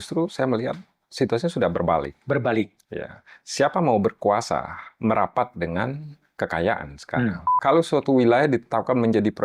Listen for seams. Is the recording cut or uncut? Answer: cut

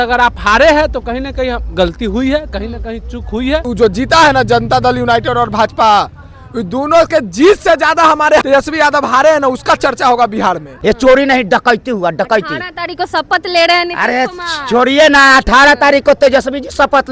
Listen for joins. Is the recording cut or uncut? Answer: cut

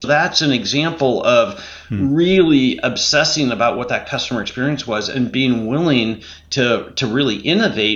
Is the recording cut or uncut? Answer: uncut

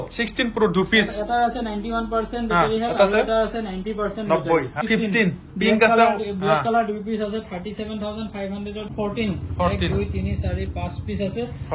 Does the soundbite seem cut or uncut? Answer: cut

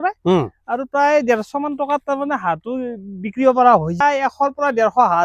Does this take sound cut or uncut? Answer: cut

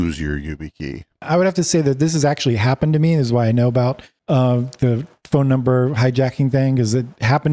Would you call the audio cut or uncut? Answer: cut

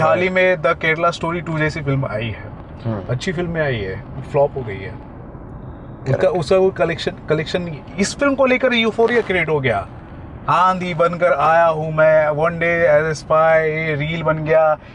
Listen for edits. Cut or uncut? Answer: uncut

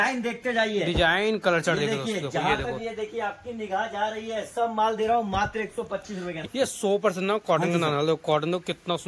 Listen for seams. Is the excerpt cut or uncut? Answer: cut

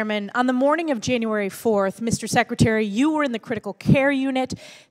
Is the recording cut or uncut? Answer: cut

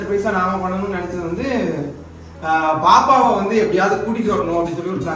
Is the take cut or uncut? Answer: uncut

